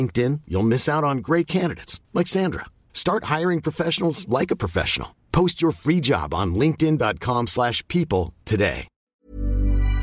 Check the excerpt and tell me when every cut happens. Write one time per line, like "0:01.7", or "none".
0:09.0

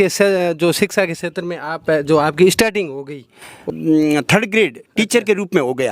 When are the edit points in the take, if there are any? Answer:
0:03.7

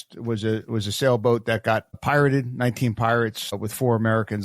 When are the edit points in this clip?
0:02.0
0:03.6

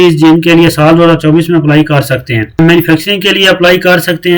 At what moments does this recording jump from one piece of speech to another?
0:02.6

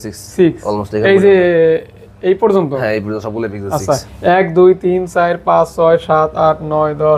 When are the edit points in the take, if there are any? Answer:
none

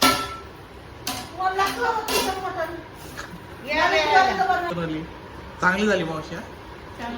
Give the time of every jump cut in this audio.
0:04.7

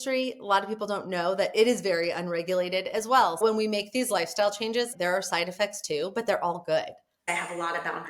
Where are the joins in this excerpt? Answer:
0:03.4
0:04.9
0:07.3

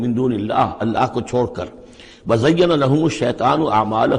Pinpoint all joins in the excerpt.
none

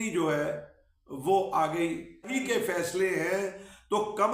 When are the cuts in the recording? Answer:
0:02.4

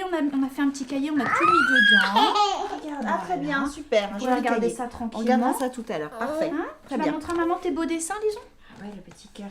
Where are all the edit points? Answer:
0:06.7

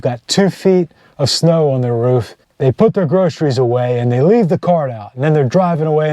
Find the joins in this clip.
0:02.4

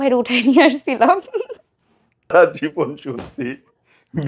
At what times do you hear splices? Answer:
0:02.3

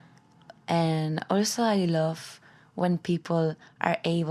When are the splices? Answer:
none

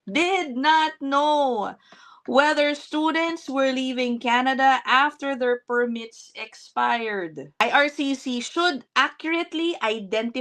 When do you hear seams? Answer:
0:07.6

